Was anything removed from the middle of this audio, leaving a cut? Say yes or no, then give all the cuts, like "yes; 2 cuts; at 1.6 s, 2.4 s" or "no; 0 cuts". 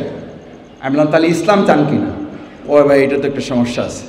no; 0 cuts